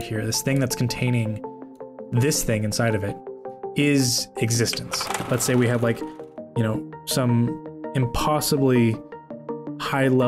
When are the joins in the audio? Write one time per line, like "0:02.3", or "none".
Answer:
0:05.2